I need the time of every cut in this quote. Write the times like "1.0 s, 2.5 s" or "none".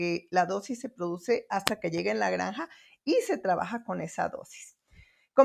none